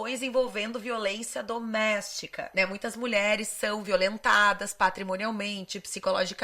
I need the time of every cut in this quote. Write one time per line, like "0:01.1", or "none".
0:02.3